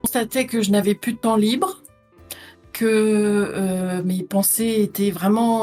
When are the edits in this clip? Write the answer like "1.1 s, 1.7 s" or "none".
none